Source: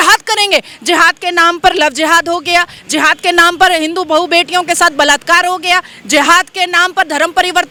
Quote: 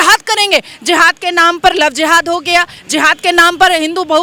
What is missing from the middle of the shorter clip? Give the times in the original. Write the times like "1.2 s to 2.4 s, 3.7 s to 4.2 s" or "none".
none